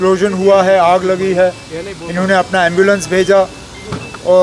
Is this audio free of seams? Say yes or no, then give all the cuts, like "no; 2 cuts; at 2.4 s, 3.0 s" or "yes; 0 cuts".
yes; 0 cuts